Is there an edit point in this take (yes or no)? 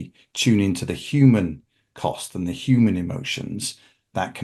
no